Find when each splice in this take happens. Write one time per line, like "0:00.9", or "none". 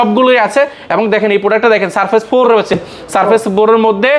none

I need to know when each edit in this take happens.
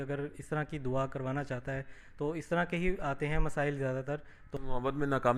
0:04.4

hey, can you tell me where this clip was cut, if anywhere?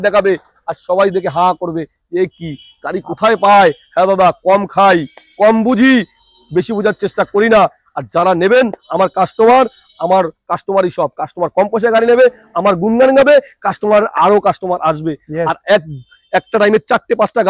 none

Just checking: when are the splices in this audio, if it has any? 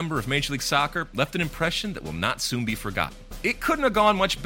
0:03.2

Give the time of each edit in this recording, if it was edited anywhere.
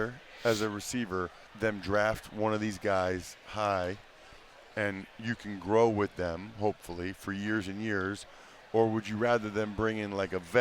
0:01.4

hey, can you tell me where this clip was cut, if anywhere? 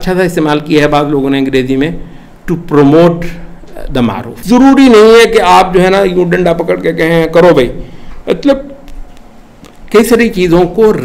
0:04.3

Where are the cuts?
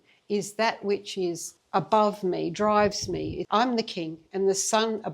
0:01.5
0:03.4

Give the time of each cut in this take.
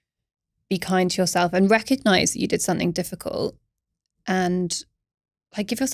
none

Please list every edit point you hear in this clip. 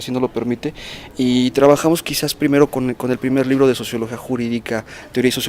0:01.7

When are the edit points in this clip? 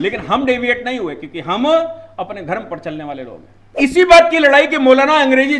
0:03.6

